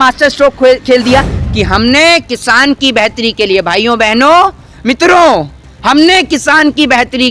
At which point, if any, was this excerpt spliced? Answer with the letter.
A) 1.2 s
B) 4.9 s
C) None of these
A